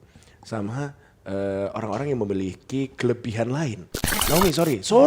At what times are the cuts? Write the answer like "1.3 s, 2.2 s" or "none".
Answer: 4.1 s